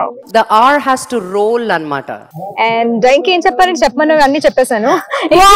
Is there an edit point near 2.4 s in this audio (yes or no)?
yes